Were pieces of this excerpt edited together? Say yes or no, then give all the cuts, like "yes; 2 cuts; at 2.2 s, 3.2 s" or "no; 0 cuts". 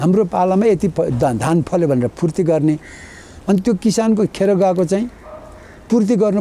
no; 0 cuts